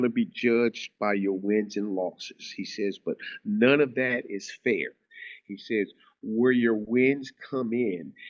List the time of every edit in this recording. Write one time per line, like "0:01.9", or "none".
none